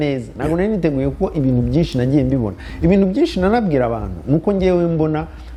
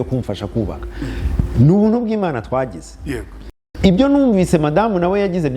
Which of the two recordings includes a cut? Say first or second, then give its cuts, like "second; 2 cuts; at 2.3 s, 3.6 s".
second; 1 cut; at 3.7 s